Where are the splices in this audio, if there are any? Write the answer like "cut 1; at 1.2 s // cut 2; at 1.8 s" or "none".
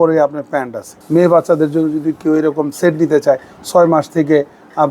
cut 1; at 0.9 s